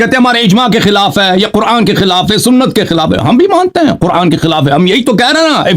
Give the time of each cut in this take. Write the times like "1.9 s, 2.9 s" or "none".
none